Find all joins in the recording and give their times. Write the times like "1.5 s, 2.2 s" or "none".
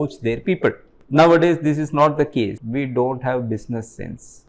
2.6 s